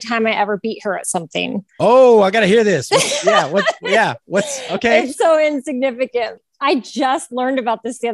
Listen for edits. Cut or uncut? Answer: cut